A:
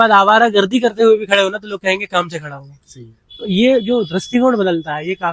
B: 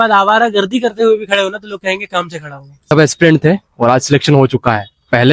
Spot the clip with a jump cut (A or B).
B